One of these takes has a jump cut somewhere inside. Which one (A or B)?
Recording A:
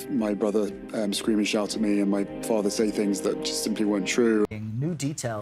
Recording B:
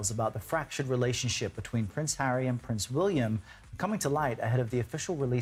A